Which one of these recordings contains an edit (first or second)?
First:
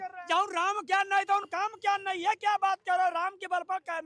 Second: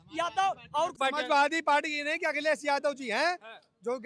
second